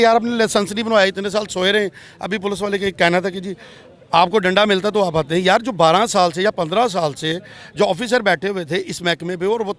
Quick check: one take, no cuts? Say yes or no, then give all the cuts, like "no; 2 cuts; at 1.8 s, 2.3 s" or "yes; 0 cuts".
yes; 0 cuts